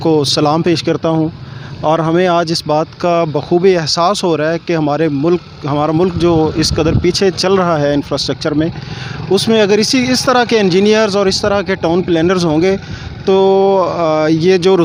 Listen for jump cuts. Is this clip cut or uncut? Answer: uncut